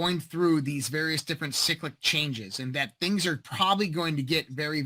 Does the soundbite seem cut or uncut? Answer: uncut